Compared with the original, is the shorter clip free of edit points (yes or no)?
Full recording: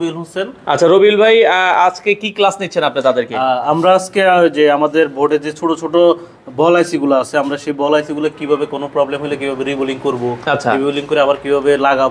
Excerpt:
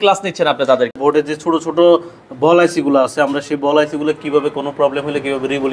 no